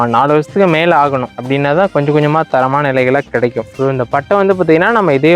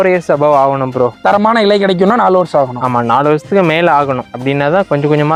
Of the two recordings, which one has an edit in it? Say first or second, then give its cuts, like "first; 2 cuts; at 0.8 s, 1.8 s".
first; 1 cut; at 3.7 s